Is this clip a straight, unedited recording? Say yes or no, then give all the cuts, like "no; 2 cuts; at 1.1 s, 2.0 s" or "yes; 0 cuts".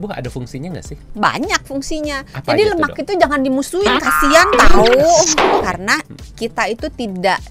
no; 2 cuts; at 1.0 s, 5.6 s